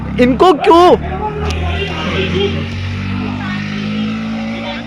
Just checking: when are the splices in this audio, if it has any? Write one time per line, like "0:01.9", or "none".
none